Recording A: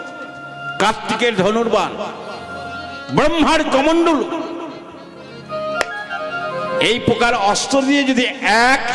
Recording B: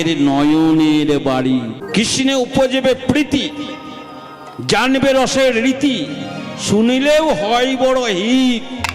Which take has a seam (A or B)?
B